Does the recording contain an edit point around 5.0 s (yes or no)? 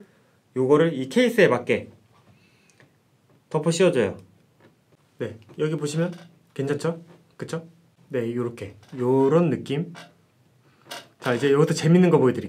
yes